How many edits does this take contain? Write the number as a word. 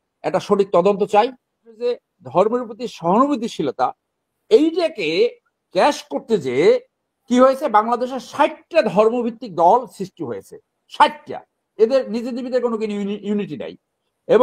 one